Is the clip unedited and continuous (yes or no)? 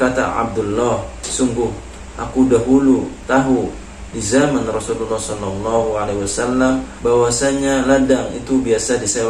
yes